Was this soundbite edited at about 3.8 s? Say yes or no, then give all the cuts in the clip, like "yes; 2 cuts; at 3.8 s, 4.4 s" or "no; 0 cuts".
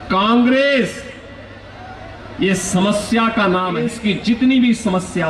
yes; 1 cut; at 3.8 s